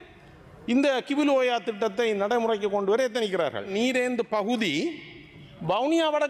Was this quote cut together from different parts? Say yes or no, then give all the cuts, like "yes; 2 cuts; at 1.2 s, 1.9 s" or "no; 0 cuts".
yes; 1 cut; at 3.7 s